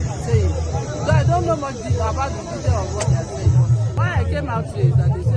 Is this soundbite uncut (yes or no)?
no